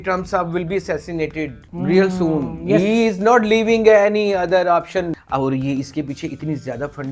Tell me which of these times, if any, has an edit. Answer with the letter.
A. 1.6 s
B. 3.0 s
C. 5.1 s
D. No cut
C